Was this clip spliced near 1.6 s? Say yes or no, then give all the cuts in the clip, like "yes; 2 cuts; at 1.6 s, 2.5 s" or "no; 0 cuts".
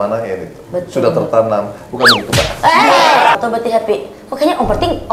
no; 1 cut; at 3.3 s